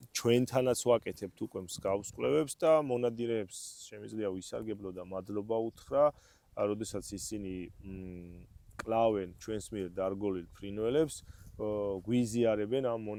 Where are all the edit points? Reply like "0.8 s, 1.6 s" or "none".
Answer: none

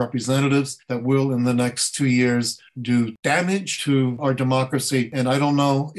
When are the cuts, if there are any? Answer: 3.4 s, 5.1 s

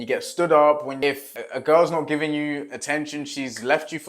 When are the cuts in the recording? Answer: 1.1 s

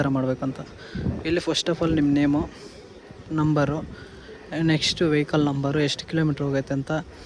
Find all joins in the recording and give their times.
none

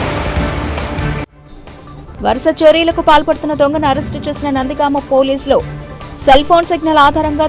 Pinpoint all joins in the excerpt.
1.0 s

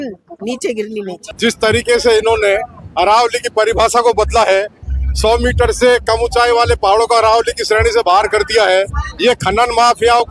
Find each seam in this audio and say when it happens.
none

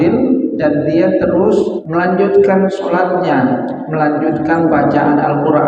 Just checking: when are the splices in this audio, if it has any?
1.8 s

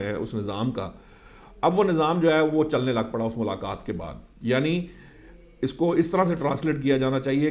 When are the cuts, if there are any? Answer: none

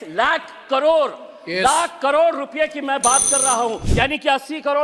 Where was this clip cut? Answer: 3.8 s

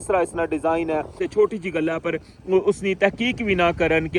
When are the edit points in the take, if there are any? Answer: 1.2 s

